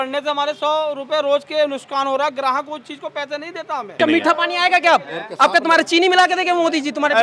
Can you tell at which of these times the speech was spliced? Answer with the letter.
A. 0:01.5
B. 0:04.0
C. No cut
B